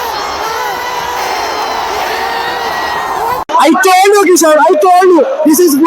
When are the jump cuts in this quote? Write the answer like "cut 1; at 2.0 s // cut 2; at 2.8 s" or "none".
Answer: cut 1; at 3.5 s